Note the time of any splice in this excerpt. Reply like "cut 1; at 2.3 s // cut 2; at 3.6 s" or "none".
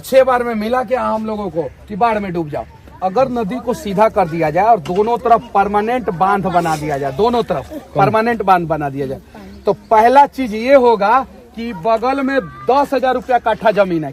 cut 1; at 2.9 s